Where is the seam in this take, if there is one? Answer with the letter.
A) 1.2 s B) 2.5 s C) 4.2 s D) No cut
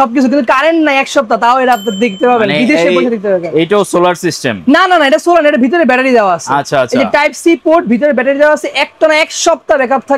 D